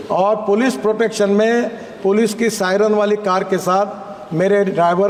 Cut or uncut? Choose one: uncut